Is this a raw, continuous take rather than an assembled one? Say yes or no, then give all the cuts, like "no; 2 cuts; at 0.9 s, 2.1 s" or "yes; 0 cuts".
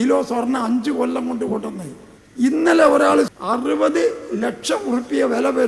no; 1 cut; at 3.3 s